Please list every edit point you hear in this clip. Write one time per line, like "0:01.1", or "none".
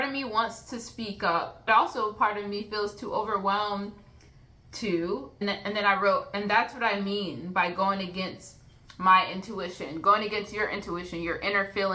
0:01.6
0:05.4